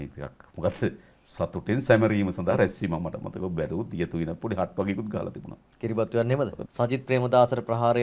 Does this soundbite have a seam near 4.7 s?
no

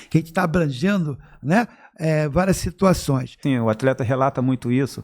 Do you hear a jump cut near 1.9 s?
no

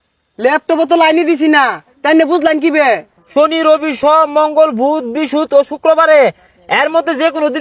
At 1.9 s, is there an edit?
no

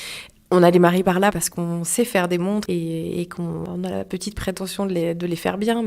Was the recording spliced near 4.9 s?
no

